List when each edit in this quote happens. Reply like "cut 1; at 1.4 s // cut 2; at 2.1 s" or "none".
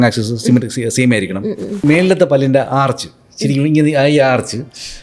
cut 1; at 1.8 s